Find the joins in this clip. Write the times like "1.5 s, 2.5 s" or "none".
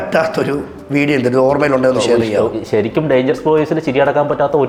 none